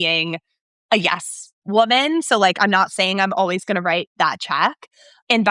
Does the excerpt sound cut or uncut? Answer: uncut